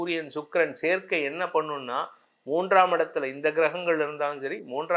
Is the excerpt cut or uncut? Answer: uncut